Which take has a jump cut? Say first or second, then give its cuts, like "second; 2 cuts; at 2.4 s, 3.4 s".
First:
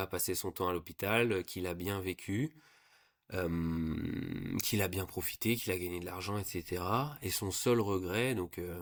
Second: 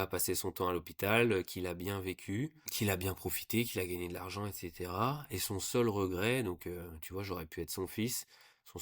second; 1 cut; at 2.7 s